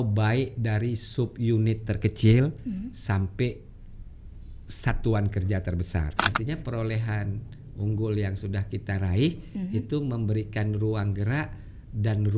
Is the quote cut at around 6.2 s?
yes; 1 cut; at 6.2 s

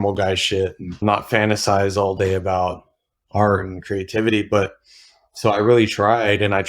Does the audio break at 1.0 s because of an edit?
yes; 1 cut; at 1.0 s

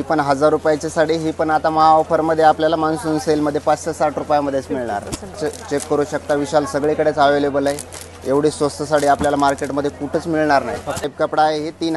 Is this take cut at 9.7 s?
no; 2 cuts; at 5.4 s, 11.0 s

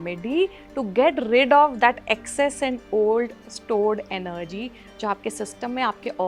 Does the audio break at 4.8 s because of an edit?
no; 0 cuts

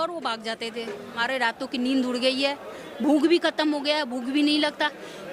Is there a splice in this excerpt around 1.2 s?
yes; 1 cut; at 1.2 s

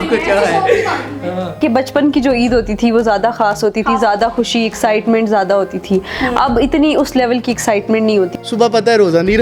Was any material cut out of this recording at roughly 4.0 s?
no; 2 cuts; at 1.6 s, 8.3 s

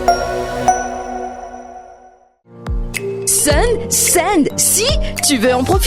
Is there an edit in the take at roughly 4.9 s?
no; 1 cut; at 2.4 s

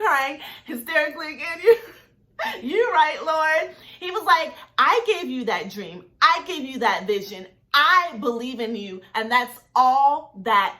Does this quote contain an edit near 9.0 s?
yes; 1 cut; at 9.0 s

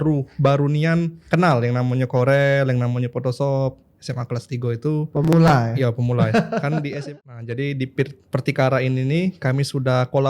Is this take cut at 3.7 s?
no; 1 cut; at 6.9 s

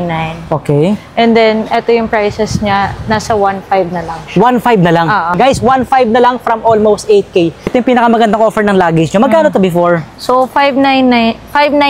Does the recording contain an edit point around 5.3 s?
yes; 2 cuts; at 5.3 s, 7.7 s

